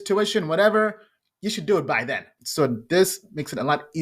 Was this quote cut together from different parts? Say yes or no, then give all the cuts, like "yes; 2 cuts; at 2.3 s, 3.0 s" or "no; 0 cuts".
yes; 1 cut; at 2.4 s